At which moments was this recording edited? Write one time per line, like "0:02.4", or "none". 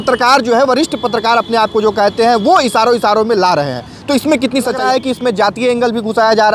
0:04.8